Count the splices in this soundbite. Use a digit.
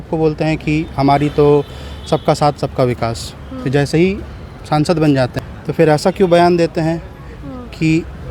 1